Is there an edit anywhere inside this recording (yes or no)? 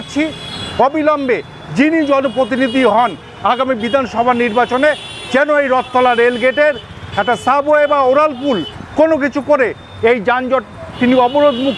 no